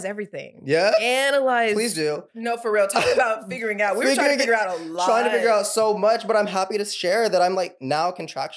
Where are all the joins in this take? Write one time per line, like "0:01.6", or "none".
0:02.3